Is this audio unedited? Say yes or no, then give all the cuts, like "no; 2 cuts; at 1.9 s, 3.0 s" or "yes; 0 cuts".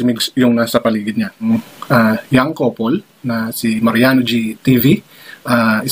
no; 1 cut; at 1.5 s